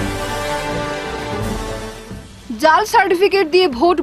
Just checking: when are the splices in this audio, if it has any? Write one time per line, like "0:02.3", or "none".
0:01.3